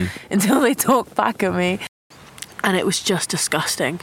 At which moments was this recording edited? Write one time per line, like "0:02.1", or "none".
0:01.9